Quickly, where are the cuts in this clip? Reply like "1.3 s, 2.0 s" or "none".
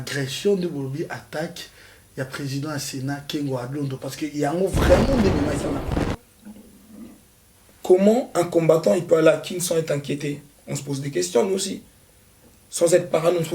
5.9 s